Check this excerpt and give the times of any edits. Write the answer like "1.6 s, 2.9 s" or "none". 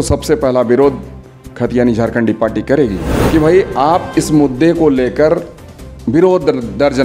3.1 s